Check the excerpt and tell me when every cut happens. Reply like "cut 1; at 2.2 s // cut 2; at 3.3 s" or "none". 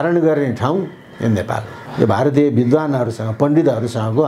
cut 1; at 1.8 s